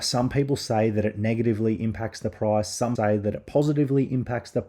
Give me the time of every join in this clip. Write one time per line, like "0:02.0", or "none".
0:02.9